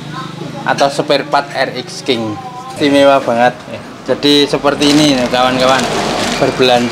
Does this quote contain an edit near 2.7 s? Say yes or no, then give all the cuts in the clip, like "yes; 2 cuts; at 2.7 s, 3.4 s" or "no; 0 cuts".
yes; 1 cut; at 2.7 s